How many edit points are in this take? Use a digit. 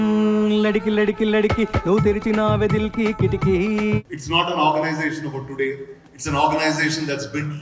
1